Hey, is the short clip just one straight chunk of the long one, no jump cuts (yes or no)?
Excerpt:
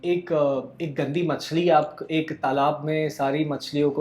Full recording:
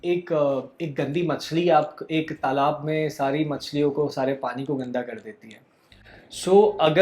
yes